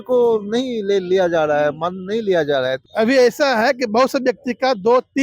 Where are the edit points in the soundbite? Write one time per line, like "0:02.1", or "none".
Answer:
0:02.8